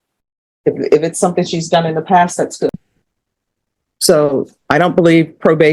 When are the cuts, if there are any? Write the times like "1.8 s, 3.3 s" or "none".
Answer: 3.2 s